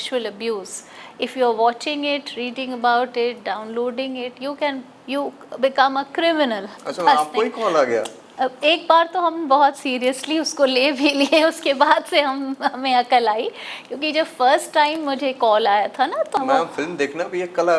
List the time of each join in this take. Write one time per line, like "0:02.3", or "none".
0:06.7
0:16.4